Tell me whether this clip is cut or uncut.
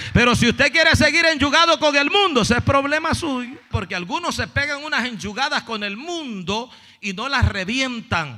cut